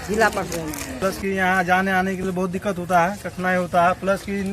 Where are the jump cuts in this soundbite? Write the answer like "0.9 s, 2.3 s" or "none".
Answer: 1.0 s